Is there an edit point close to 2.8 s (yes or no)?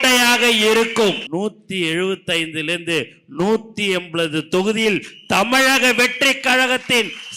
no